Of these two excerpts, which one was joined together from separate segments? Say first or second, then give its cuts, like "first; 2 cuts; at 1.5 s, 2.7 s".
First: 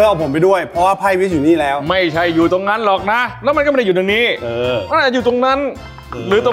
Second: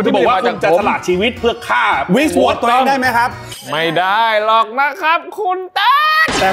second; 1 cut; at 3.5 s